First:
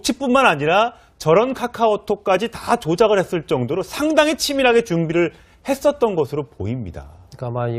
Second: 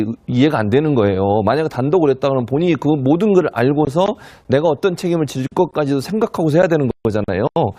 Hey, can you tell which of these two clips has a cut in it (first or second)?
first